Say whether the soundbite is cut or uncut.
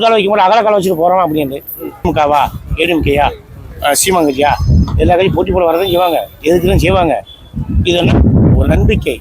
cut